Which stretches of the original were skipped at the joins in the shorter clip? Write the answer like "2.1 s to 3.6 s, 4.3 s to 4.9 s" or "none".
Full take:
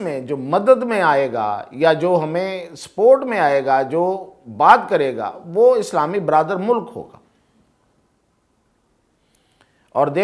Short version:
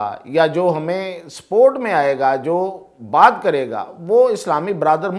none

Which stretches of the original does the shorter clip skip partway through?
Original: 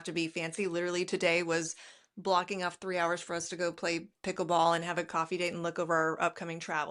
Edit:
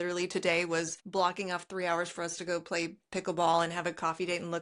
1.8 s to 2.1 s

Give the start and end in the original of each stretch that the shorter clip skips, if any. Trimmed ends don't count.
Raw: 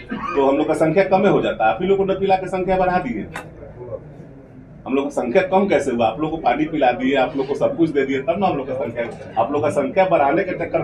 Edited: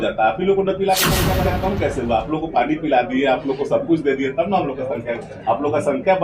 2.9 s to 5.4 s

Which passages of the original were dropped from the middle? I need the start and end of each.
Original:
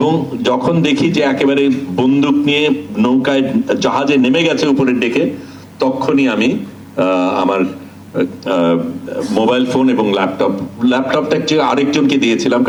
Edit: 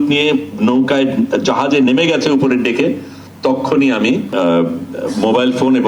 6.6 s to 8.4 s

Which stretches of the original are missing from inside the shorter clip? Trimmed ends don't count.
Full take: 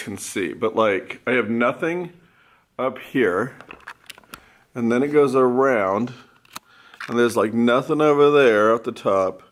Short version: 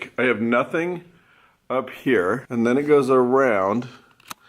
3.5 s to 4.7 s

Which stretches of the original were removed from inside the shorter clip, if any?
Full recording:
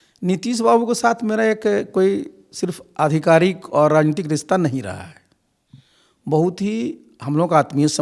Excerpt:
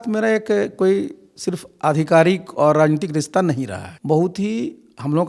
5.0 s to 6.1 s

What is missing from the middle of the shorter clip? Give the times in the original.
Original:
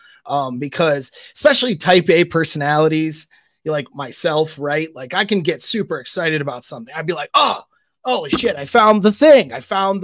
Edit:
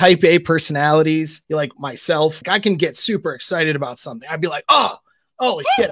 3.2 s to 3.5 s, 4.5 s to 5.0 s

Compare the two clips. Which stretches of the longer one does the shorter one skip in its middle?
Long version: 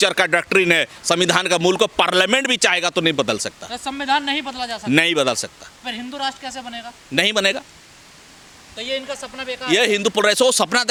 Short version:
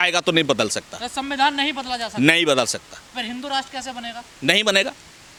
none

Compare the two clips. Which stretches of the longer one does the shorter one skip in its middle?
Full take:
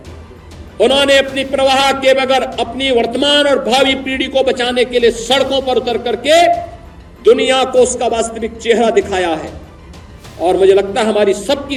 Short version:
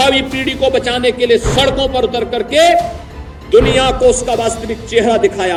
none

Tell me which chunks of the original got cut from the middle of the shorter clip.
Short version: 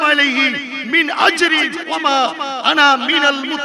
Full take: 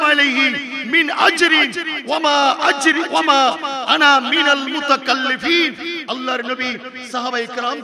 1.8 s to 3.1 s

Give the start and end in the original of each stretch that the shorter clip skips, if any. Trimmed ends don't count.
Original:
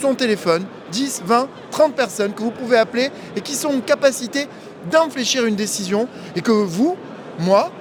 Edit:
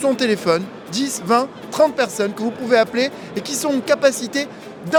none

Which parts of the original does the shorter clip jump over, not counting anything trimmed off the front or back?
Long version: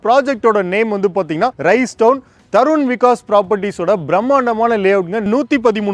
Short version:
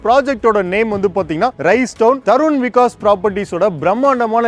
2.2 s to 2.5 s

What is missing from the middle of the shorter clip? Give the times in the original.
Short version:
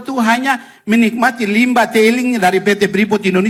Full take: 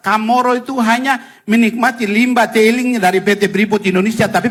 none

